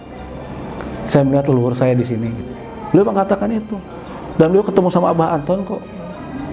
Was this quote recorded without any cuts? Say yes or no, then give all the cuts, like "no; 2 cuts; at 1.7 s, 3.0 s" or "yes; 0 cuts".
yes; 0 cuts